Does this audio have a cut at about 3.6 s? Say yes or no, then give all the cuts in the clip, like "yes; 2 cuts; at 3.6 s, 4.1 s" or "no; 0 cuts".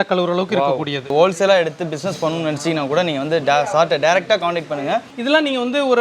no; 2 cuts; at 1.1 s, 5.1 s